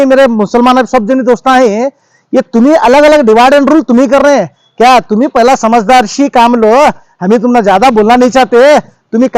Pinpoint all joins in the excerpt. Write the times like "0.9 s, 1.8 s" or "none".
none